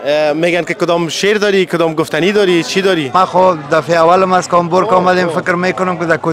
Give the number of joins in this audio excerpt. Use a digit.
1